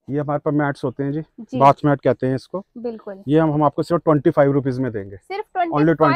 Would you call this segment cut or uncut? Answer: uncut